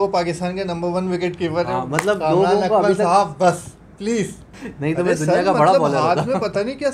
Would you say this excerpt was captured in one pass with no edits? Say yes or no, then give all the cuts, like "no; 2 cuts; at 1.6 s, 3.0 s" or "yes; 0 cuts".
no; 1 cut; at 4.5 s